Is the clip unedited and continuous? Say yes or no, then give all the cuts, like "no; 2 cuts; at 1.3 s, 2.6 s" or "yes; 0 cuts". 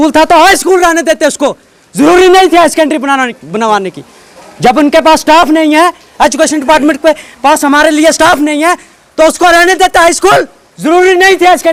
yes; 0 cuts